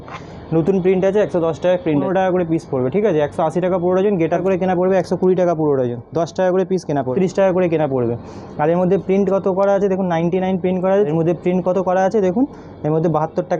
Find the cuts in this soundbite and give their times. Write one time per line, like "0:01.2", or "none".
0:02.0
0:04.4
0:07.1
0:11.1